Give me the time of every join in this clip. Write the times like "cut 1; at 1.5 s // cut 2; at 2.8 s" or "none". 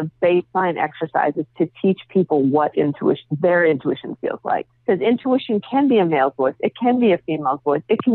cut 1; at 4.7 s

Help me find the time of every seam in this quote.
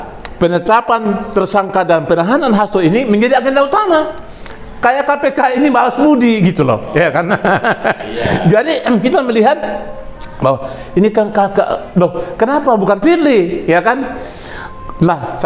none

